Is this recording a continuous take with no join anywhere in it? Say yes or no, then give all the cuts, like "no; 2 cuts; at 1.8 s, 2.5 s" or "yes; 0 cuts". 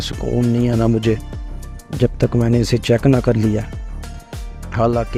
yes; 0 cuts